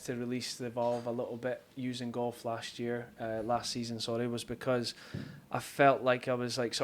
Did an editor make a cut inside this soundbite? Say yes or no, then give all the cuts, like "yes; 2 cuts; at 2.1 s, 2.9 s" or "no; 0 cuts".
no; 0 cuts